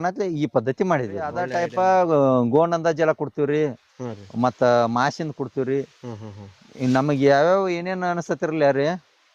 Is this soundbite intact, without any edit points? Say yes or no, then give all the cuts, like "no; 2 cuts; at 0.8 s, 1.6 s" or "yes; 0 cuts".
no; 1 cut; at 1.4 s